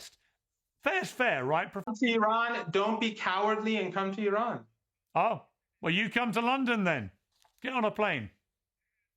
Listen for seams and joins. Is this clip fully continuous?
no; 1 cut; at 1.9 s

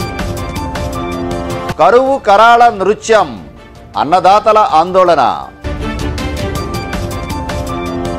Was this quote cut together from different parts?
no; 0 cuts

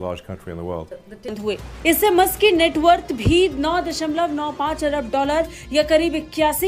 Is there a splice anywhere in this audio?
yes; 1 cut; at 1.3 s

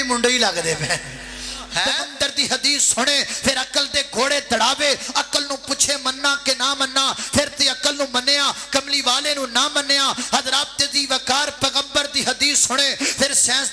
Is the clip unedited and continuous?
no; 1 cut; at 2.0 s

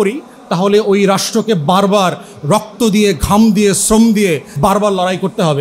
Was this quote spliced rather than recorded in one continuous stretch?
yes; 1 cut; at 4.6 s

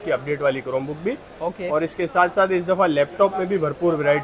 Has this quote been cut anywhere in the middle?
no; 0 cuts

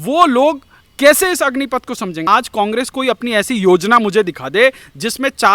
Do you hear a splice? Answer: yes; 1 cut; at 2.2 s

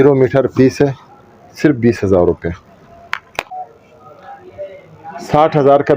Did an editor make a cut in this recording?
yes; 1 cut; at 3.5 s

